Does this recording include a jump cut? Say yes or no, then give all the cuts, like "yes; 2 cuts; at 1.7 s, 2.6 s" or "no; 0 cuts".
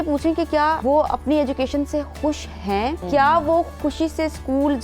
yes; 2 cuts; at 0.8 s, 3.0 s